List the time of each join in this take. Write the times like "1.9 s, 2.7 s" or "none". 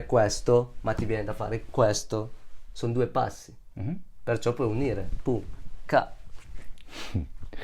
none